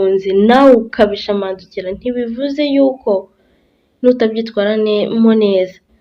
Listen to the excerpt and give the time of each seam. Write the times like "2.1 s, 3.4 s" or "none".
none